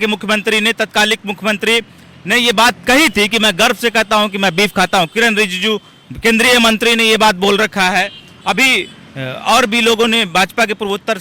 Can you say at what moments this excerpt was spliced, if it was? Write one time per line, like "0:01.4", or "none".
none